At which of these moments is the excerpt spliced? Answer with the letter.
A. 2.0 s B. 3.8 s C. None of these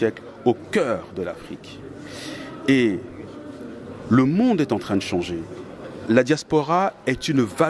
C